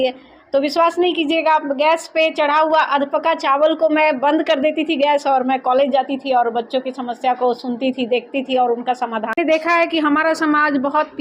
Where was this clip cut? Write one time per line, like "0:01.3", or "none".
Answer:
0:09.4